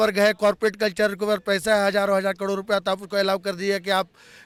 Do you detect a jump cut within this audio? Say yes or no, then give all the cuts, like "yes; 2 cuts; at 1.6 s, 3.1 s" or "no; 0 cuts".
no; 0 cuts